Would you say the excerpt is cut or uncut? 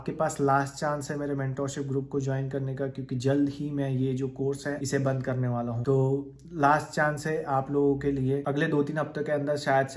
uncut